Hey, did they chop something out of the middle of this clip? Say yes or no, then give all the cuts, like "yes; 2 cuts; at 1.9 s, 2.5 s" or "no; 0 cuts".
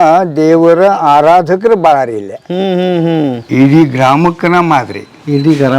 yes; 1 cut; at 3.4 s